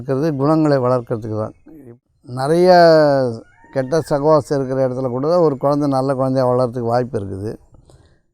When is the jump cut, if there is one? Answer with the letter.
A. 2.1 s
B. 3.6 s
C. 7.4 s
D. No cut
A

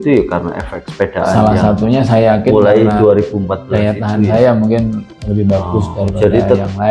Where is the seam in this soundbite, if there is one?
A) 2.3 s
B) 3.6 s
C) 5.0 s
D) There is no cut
D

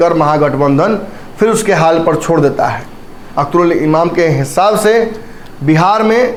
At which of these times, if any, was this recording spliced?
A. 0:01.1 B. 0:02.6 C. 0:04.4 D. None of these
D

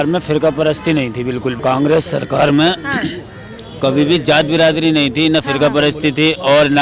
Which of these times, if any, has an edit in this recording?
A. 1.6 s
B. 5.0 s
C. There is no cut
A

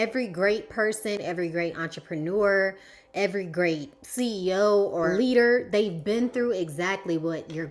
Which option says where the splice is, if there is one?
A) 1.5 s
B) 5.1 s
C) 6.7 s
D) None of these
B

